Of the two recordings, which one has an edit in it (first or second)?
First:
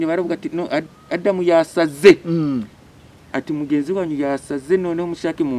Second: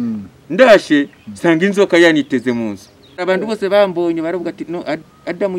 second